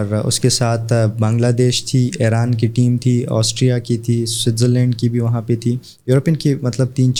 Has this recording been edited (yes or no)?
no